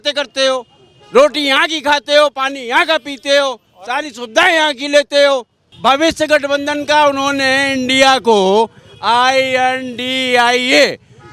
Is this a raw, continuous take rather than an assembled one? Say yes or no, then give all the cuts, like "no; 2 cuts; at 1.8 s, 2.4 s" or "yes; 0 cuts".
no; 1 cut; at 5.6 s